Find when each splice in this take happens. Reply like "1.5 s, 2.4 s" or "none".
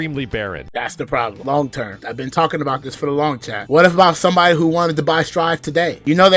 1.0 s, 2.0 s, 3.6 s